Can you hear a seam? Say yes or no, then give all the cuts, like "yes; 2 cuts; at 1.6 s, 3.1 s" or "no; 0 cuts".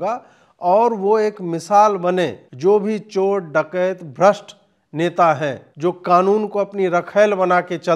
yes; 2 cuts; at 2.5 s, 5.7 s